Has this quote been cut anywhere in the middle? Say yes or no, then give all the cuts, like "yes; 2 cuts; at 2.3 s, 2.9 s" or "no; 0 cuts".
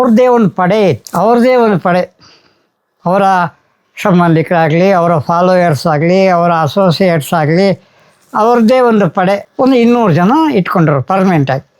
no; 0 cuts